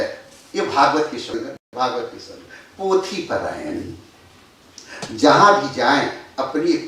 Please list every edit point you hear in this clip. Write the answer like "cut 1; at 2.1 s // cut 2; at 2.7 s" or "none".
cut 1; at 1.6 s